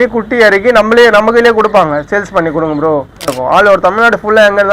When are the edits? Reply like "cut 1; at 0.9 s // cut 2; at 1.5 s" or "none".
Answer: cut 1; at 3.4 s